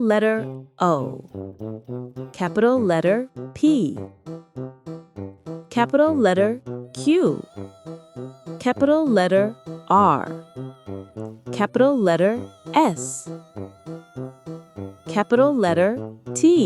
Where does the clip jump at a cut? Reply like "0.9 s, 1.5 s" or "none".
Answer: 4.0 s, 5.7 s, 10.3 s, 11.6 s, 13.0 s, 15.1 s